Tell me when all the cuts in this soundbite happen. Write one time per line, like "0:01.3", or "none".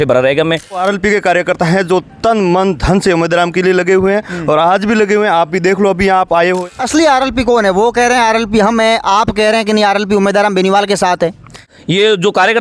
0:00.8
0:06.6
0:11.7

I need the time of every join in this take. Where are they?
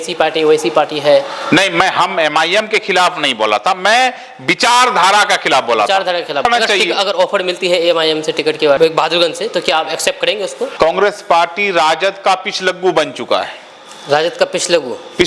0:06.4
0:10.7

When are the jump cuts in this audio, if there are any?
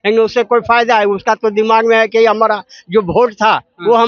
none

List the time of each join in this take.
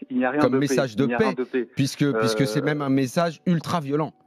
none

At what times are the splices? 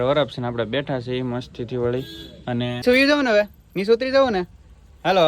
0:02.8

